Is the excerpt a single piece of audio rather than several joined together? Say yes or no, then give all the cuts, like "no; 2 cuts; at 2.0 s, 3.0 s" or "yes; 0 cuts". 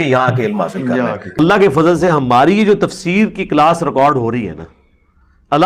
no; 1 cut; at 1.2 s